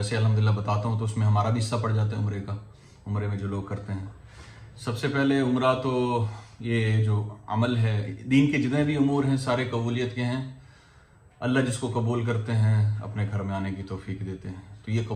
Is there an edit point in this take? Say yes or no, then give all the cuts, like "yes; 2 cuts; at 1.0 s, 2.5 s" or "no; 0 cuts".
no; 0 cuts